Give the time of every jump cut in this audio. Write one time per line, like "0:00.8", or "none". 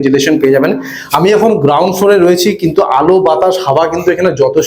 none